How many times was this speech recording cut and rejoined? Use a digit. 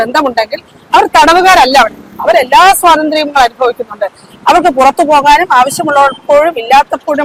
0